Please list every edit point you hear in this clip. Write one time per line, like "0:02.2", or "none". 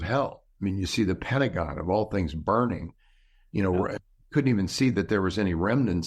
none